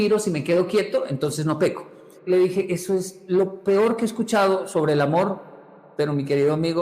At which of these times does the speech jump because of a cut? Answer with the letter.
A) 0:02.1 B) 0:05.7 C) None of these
A